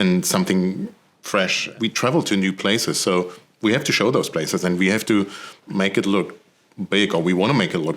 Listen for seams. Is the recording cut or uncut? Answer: cut